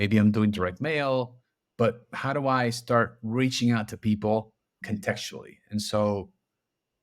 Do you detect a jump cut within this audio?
yes; 1 cut; at 4.8 s

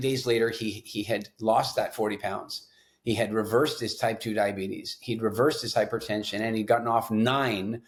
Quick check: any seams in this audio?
no; 0 cuts

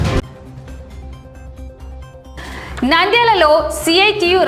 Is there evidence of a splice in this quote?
yes; 1 cut; at 1.6 s

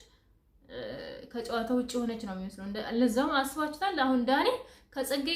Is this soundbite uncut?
yes; 0 cuts

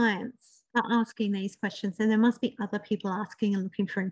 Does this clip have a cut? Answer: no; 0 cuts

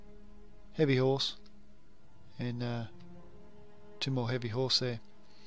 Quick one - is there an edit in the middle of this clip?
yes; 1 cut; at 4.3 s

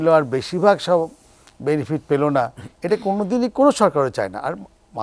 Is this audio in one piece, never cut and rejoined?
yes; 0 cuts

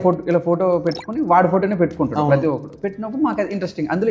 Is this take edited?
no; 0 cuts

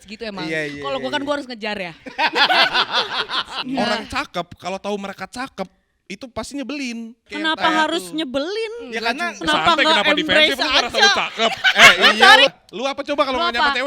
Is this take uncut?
no; 3 cuts; at 3.5 s, 7.3 s, 12.5 s

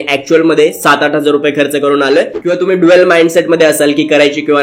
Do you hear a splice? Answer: yes; 1 cut; at 2.4 s

